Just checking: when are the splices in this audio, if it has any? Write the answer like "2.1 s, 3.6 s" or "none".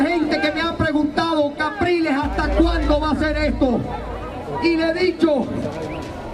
none